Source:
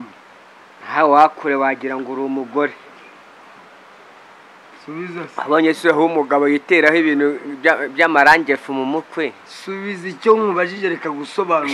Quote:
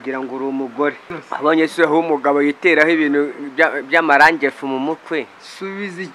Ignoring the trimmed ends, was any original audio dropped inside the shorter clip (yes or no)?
yes